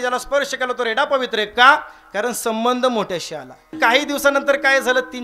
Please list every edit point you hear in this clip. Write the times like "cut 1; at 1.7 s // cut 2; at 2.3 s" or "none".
cut 1; at 3.7 s